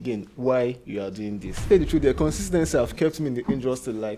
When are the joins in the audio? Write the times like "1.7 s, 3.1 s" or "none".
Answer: 1.7 s